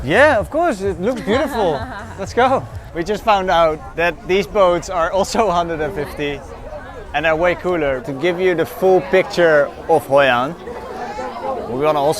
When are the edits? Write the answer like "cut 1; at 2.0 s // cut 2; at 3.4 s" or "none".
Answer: cut 1; at 2.8 s // cut 2; at 3.9 s // cut 3; at 8.1 s